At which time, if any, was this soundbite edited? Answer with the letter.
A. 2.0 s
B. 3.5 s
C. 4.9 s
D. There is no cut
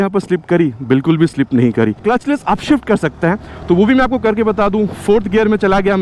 A